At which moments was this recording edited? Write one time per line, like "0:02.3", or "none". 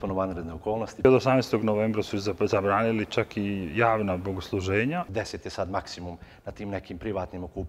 0:01.0
0:05.1